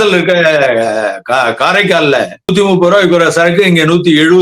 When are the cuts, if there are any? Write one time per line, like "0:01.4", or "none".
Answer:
0:02.5